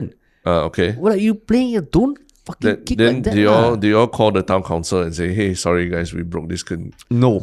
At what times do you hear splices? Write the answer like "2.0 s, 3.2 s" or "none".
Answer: none